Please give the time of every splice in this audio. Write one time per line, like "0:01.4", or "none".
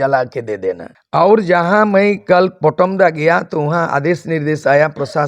0:00.9